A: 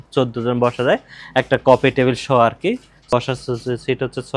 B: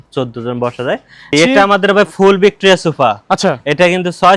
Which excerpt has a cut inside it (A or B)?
B